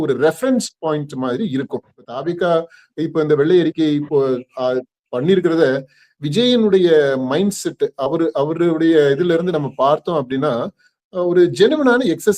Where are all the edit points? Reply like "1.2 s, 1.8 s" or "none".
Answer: 2.0 s